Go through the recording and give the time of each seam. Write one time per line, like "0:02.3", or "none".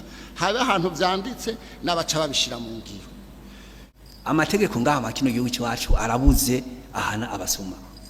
0:03.9